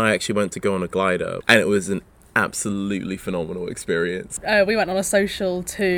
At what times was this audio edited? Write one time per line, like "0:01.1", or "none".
0:01.4
0:04.3